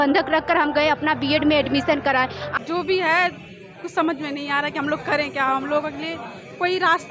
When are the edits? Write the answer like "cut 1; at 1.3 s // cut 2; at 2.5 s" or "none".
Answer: cut 1; at 2.4 s